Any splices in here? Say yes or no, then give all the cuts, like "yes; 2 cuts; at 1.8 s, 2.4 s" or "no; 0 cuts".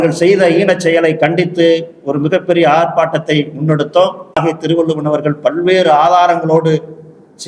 yes; 1 cut; at 4.3 s